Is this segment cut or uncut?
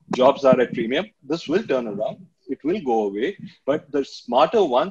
cut